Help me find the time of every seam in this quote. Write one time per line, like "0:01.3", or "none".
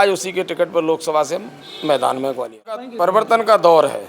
0:02.9